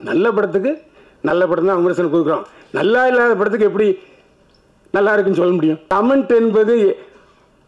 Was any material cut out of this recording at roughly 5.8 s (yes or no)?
yes